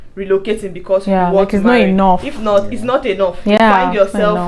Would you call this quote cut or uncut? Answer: uncut